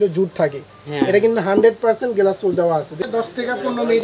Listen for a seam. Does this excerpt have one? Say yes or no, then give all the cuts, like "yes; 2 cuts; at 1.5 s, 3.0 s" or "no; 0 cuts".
yes; 1 cut; at 3.0 s